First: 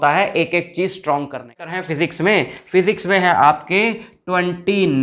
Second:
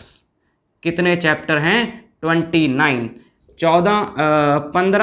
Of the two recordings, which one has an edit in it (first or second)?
first